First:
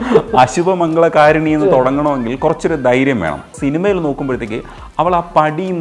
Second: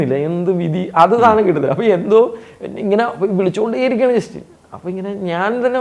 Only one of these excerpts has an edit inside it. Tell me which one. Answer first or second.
first